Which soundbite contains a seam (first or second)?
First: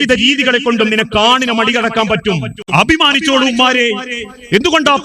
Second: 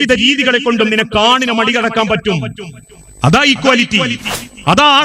first